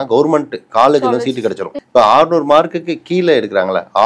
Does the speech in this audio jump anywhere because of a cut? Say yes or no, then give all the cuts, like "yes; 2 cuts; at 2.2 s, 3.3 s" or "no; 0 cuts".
yes; 1 cut; at 1.7 s